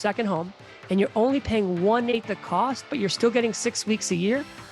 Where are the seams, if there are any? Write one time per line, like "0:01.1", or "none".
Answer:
0:02.1